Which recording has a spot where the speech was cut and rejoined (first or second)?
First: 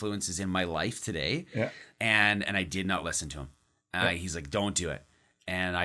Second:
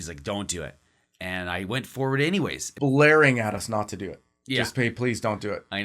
second